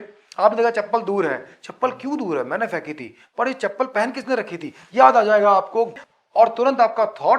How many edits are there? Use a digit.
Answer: 1